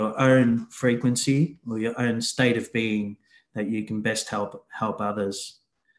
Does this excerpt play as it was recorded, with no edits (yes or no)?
yes